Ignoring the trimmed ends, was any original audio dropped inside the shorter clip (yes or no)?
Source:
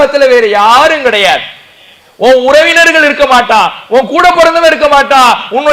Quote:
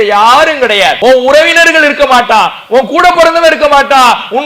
yes